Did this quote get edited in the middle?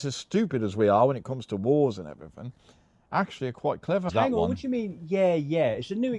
yes; 1 cut; at 4.1 s

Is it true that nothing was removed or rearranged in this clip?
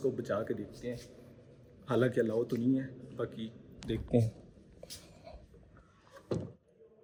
yes; 0 cuts

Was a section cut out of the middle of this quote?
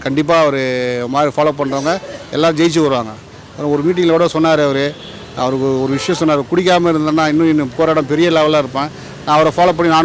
no; 0 cuts

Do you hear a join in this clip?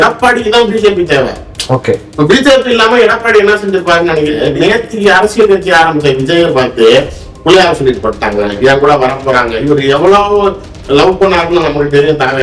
yes; 1 cut; at 4.4 s

